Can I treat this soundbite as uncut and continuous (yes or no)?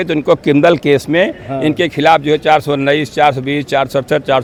yes